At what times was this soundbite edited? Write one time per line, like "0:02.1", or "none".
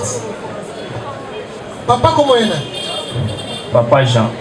0:01.6